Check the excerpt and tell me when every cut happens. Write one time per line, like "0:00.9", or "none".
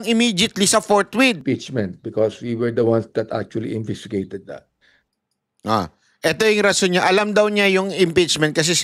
0:01.4